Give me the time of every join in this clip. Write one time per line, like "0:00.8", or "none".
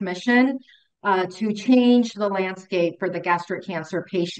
none